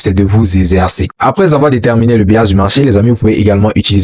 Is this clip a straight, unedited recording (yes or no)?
no